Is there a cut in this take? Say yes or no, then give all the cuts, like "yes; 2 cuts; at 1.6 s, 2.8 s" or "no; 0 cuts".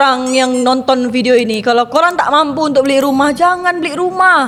no; 0 cuts